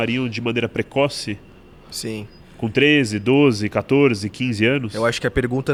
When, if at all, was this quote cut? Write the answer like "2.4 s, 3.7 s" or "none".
none

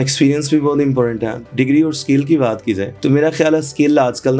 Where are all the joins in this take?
1.4 s

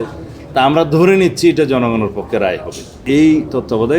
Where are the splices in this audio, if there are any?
2.9 s

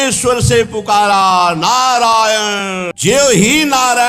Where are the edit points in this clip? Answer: 2.9 s

